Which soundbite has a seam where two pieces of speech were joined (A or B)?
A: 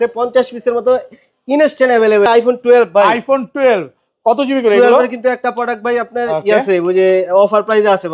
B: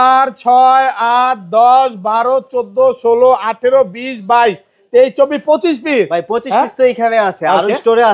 A